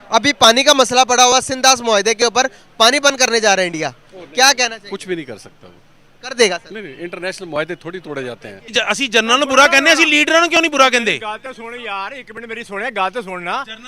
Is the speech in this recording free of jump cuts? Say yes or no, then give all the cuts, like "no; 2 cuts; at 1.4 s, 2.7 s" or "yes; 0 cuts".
no; 1 cut; at 8.7 s